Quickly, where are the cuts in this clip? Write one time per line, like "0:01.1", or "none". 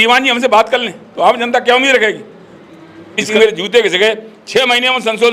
0:03.2